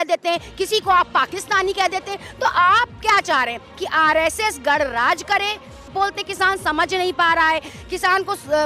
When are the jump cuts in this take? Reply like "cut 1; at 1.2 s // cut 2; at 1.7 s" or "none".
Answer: cut 1; at 5.9 s